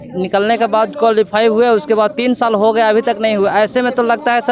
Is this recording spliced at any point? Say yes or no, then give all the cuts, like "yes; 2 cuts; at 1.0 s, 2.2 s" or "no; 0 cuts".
no; 0 cuts